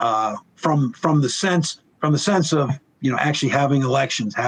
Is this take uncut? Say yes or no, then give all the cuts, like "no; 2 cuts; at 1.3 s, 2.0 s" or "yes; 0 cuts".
yes; 0 cuts